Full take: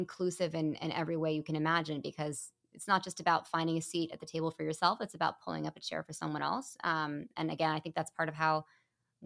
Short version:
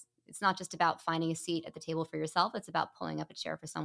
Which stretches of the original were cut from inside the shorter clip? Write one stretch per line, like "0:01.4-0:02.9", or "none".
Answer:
none